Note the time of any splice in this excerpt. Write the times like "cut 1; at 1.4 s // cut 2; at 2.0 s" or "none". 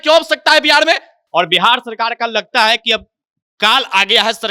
cut 1; at 1.1 s

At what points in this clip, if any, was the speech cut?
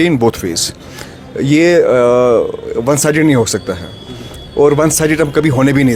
none

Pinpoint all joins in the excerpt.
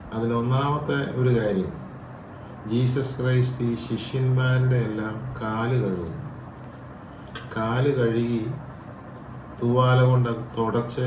none

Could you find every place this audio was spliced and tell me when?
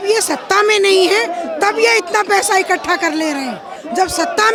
none

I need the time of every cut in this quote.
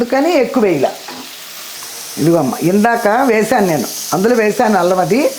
cut 1; at 1.8 s

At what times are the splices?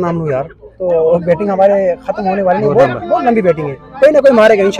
none

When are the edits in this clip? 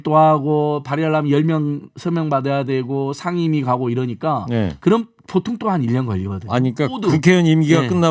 cut 1; at 7.0 s

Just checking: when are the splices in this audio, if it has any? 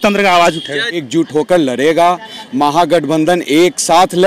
cut 1; at 1.1 s

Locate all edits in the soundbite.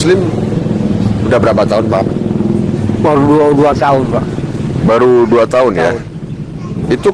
none

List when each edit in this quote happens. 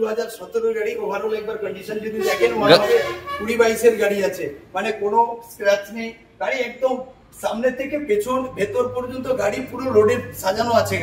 none

